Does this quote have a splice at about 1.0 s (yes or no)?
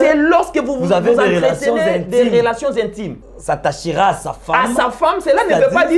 no